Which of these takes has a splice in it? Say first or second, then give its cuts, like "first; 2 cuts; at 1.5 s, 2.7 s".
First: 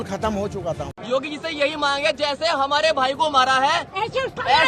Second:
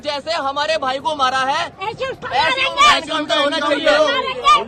first; 1 cut; at 0.9 s